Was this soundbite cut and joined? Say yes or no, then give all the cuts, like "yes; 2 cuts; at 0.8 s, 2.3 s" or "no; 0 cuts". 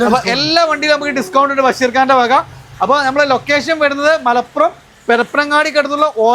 no; 0 cuts